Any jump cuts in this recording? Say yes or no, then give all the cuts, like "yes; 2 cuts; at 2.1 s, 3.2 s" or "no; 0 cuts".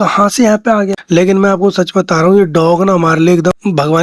yes; 1 cut; at 1.0 s